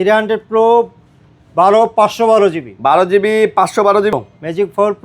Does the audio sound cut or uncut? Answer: cut